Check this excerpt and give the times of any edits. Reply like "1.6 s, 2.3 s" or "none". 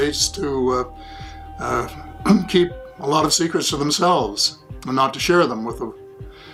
none

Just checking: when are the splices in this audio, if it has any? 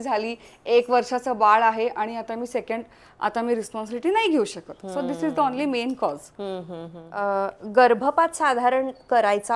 none

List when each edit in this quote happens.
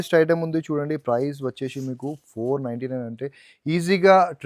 none

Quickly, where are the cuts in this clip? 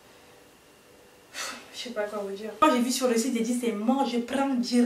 2.6 s

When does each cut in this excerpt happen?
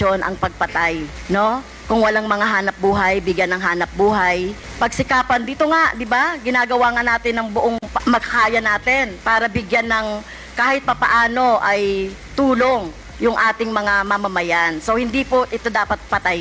none

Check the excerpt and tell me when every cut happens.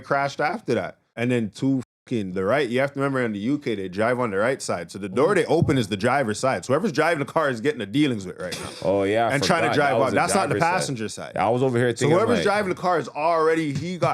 1.0 s

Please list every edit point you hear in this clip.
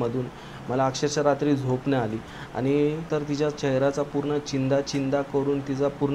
3.1 s

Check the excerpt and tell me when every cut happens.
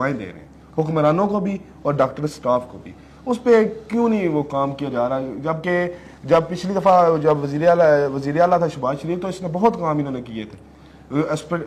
none

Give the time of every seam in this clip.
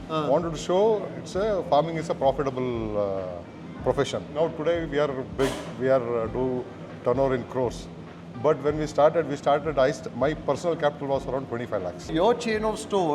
4.3 s, 12.1 s

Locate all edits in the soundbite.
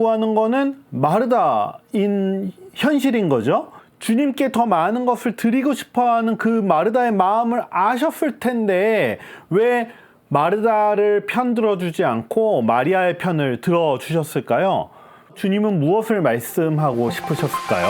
3.8 s, 15.4 s

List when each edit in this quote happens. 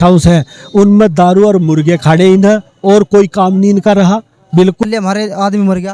4.8 s

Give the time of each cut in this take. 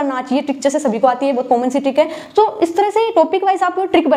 none

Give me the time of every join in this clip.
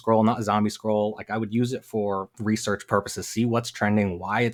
none

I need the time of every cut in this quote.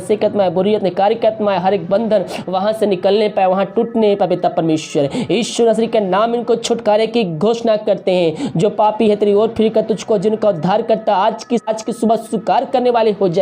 11.7 s

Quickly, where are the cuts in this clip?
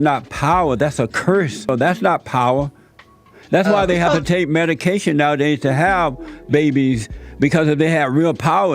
1.7 s

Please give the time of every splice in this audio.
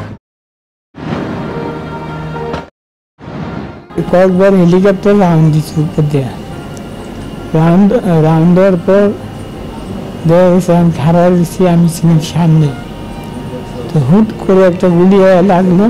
3.8 s

